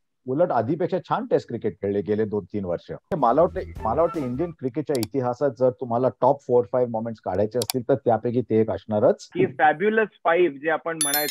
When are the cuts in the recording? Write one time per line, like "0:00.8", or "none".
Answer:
0:03.1
0:09.3